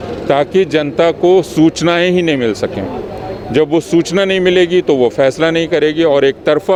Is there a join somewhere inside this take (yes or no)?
no